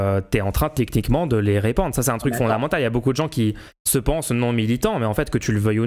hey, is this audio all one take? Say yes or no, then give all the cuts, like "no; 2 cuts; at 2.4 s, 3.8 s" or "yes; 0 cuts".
yes; 0 cuts